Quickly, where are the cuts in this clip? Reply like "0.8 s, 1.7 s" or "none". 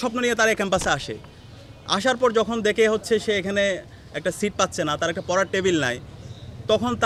none